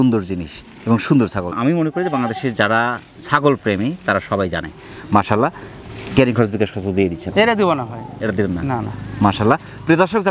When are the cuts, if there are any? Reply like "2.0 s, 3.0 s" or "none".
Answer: none